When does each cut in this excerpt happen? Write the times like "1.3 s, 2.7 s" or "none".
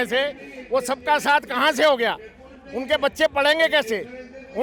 none